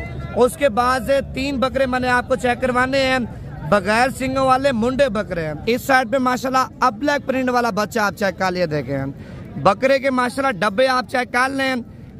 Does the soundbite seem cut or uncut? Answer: cut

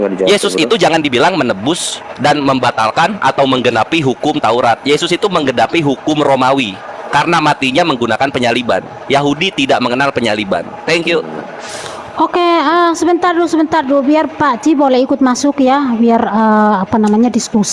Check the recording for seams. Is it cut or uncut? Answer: uncut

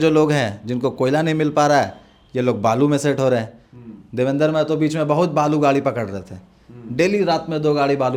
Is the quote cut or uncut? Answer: uncut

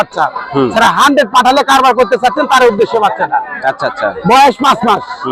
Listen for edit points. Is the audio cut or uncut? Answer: uncut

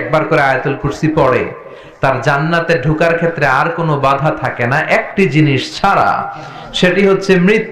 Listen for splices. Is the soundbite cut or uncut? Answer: uncut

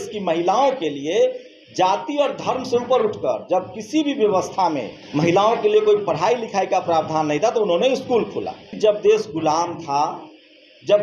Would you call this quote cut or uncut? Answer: cut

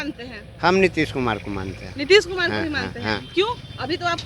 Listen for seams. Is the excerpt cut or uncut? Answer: uncut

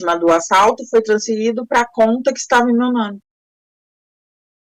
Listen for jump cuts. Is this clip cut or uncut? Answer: uncut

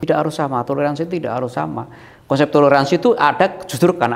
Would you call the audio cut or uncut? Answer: uncut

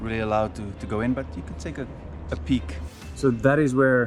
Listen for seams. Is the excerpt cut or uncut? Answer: cut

